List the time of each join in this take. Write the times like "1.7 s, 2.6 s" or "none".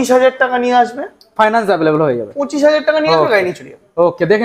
none